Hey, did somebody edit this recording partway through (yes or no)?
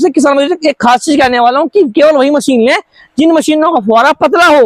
no